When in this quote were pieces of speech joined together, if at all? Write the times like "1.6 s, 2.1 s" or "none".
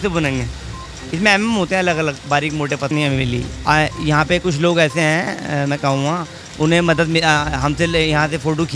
2.9 s